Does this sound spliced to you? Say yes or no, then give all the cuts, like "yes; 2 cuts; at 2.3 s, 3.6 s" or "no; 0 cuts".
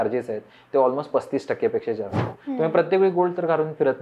yes; 1 cut; at 2.4 s